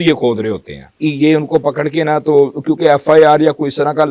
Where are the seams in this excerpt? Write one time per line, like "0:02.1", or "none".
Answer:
0:00.9